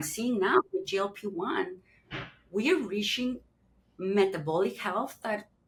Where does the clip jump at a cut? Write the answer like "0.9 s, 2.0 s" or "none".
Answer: none